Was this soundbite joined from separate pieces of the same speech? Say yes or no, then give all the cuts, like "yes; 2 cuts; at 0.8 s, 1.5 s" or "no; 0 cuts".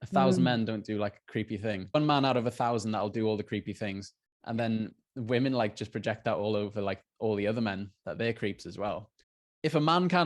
yes; 3 cuts; at 1.9 s, 5.1 s, 9.1 s